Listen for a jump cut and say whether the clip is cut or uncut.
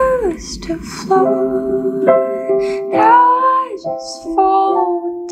uncut